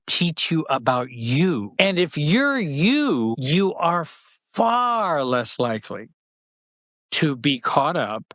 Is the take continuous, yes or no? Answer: no